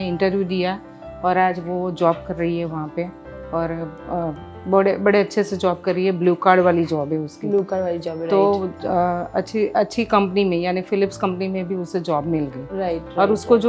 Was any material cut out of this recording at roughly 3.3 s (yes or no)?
no